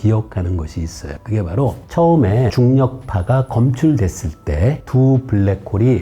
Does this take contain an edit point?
no; 0 cuts

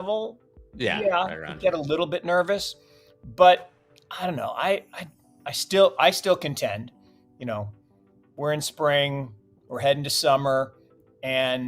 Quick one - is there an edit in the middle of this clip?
no; 0 cuts

